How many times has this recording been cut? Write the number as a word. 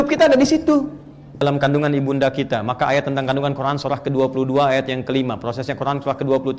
one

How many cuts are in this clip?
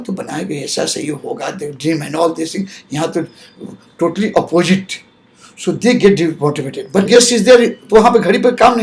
one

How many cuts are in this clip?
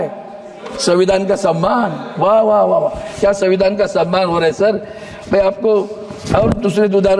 zero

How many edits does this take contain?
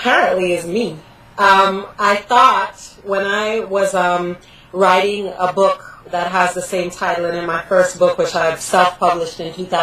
one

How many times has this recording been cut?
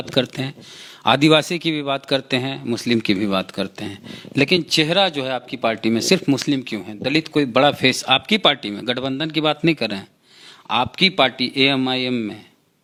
zero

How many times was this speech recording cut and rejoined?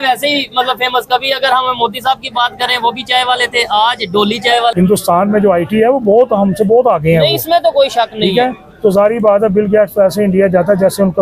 one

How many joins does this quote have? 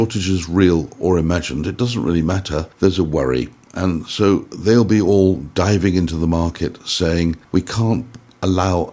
two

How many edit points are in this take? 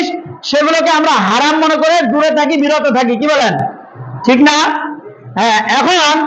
zero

